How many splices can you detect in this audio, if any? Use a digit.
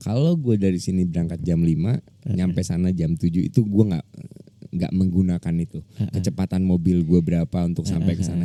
0